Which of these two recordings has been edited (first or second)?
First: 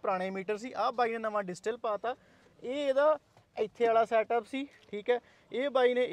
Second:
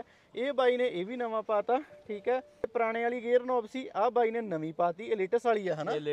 second